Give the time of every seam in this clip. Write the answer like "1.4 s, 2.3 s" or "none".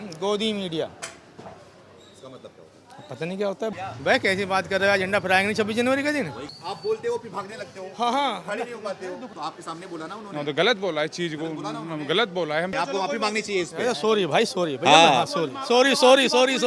3.7 s, 6.5 s, 9.3 s, 12.7 s